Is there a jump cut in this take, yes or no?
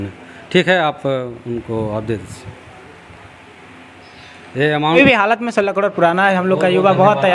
yes